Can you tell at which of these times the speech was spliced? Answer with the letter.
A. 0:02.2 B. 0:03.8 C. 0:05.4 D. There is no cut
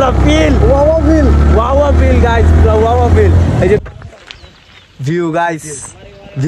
B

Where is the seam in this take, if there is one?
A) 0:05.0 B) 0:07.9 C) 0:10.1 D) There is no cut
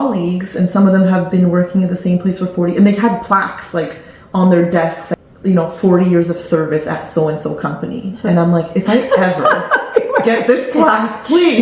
A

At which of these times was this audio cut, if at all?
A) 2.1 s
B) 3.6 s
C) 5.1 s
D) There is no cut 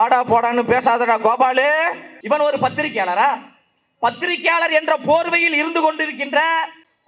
A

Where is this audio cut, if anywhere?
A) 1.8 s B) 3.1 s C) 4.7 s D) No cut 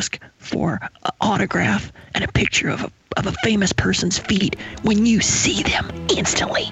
D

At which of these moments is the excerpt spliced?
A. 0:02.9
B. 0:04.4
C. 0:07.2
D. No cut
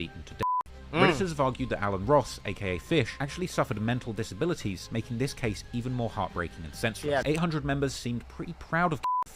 C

